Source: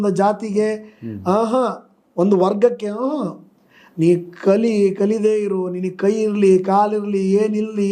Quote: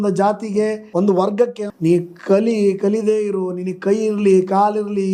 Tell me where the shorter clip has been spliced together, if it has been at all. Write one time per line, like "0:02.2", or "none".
0:00.8
0:01.6

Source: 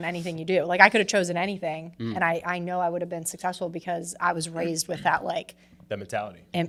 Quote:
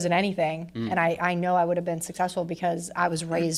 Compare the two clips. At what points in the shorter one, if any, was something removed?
none

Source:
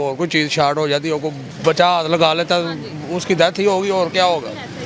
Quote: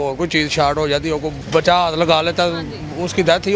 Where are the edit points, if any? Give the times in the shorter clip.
0:01.4

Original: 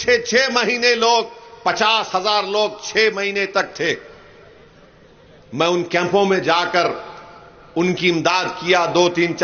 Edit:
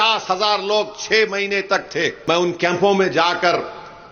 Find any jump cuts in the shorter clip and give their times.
0:02.2

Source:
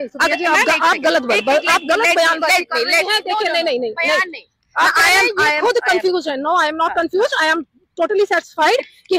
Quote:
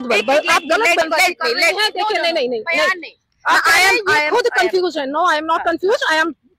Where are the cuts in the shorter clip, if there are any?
0:01.0

